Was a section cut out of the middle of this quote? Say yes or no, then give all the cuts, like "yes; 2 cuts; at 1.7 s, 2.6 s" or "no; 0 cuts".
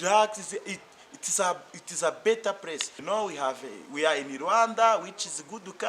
yes; 1 cut; at 2.9 s